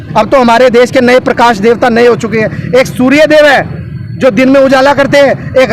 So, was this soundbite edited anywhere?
no; 0 cuts

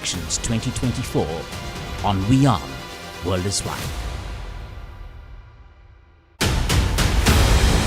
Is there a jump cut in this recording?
yes; 1 cut; at 6.2 s

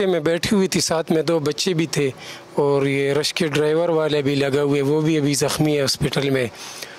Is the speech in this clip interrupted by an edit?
no; 0 cuts

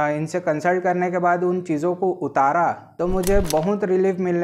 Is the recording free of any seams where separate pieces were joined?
no; 1 cut; at 2.9 s

